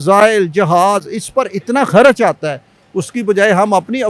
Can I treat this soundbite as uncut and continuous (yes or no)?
yes